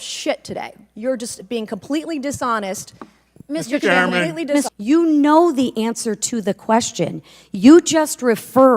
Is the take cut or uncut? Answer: cut